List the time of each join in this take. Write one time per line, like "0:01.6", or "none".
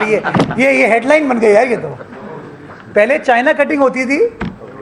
none